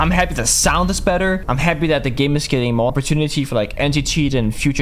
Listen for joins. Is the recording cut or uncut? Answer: cut